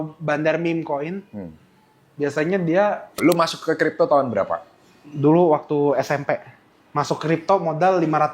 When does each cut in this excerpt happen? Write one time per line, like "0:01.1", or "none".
0:03.2